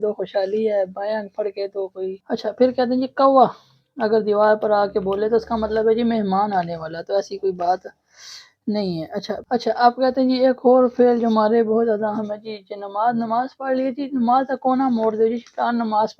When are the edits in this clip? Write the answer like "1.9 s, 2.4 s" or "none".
2.2 s, 9.4 s